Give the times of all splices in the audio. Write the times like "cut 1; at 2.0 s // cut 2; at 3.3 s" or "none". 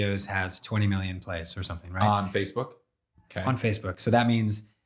none